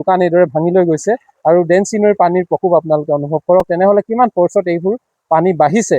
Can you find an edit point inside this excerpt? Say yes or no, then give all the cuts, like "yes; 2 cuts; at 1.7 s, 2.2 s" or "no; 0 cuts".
no; 0 cuts